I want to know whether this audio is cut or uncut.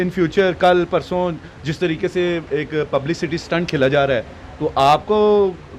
uncut